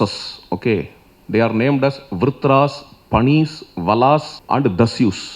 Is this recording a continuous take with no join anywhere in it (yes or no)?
no